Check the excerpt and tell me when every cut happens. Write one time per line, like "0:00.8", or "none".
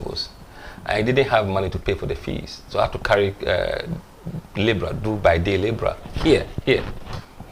none